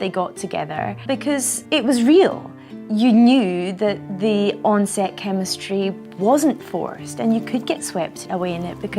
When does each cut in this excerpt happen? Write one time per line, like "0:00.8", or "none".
0:01.5